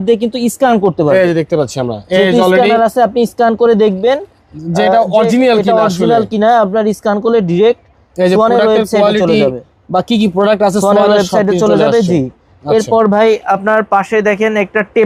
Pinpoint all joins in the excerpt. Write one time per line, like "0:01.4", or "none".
none